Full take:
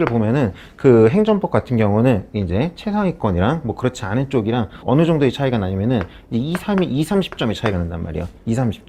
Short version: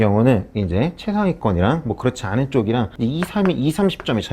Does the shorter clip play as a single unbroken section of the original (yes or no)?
no